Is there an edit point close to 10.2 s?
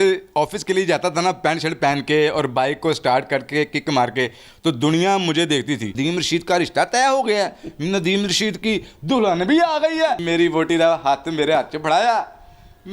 yes; 2 cuts; at 5.9 s, 10.2 s

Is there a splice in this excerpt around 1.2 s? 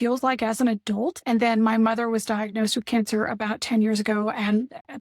yes; 1 cut; at 1.2 s

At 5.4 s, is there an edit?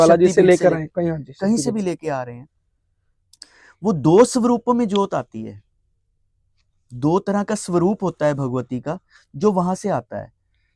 no; 0 cuts

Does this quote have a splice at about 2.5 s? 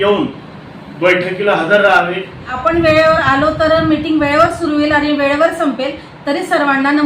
yes; 1 cut; at 2.5 s

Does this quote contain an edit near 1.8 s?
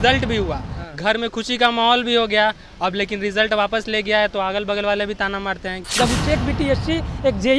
no; 1 cut; at 5.8 s

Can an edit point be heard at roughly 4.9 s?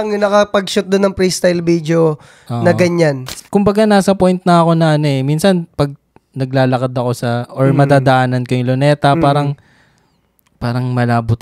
no; 1 cut; at 3.3 s

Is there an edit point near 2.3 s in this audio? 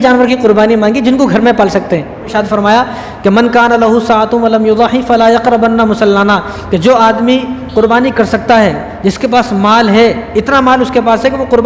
yes; 1 cut; at 2.3 s

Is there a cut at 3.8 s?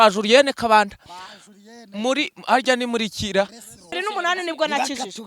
yes; 1 cut; at 3.8 s

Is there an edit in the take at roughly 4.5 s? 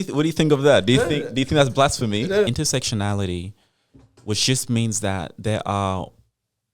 no; 1 cut; at 2.5 s

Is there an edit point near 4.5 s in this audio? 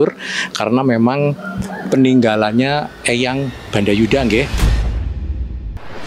yes; 1 cut; at 4.5 s

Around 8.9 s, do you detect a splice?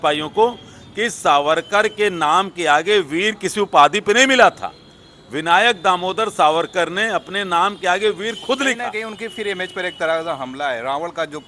yes; 1 cut; at 8.9 s

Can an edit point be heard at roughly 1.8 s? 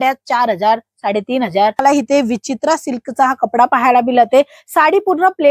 yes; 1 cut; at 1.8 s

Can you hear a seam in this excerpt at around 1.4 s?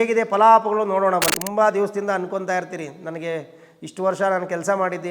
yes; 1 cut; at 1.4 s

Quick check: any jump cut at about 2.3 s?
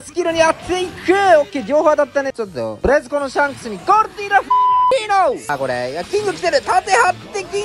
yes; 2 cuts; at 2.3 s, 5.5 s

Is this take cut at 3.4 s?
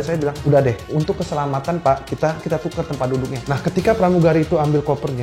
yes; 1 cut; at 3.4 s

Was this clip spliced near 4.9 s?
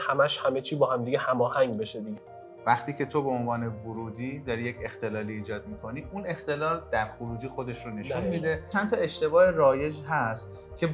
no; 2 cuts; at 2.0 s, 8.7 s

